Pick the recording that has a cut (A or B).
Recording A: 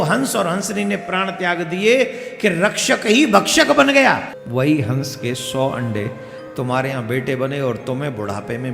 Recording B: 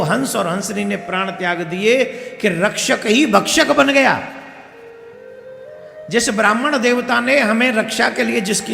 A